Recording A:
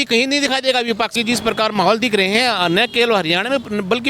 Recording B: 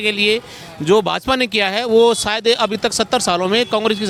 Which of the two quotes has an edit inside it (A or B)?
A